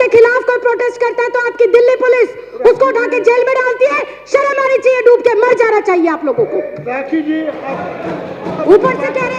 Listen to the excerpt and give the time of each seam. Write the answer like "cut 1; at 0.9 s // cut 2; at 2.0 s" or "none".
none